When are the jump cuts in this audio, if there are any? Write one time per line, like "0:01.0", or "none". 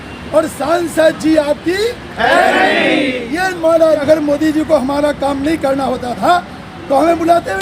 0:04.0

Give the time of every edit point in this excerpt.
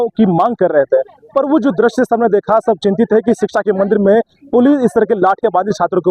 none

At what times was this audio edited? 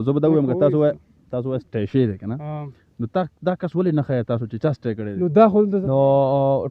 0:05.7

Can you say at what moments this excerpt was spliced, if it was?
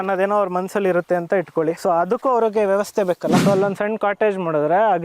0:01.8
0:03.4

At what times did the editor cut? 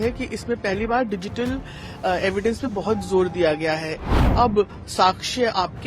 0:04.0

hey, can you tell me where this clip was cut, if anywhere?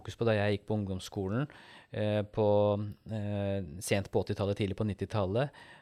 none

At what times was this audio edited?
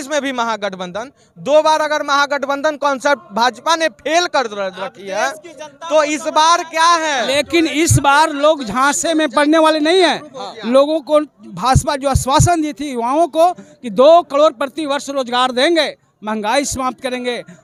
none

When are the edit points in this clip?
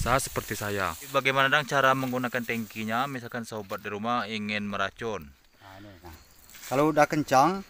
0:01.1
0:06.1

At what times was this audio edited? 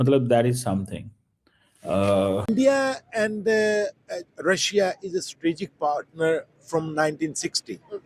0:02.4

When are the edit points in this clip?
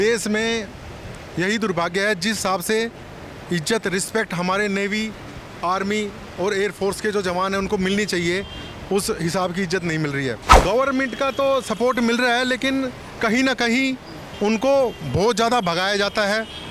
0:10.5

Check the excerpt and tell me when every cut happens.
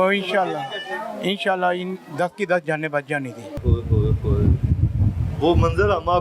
0:03.6

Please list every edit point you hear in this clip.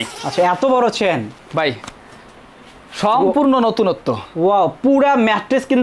0:01.3

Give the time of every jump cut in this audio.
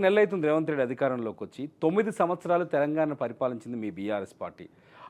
none

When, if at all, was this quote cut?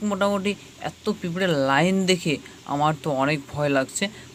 none

